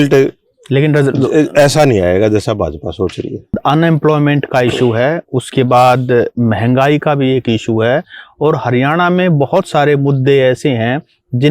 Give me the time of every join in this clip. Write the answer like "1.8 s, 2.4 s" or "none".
3.6 s